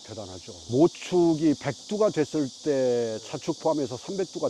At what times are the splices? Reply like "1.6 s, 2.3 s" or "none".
none